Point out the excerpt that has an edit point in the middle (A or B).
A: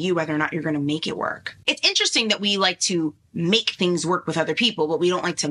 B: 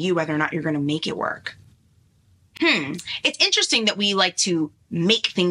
A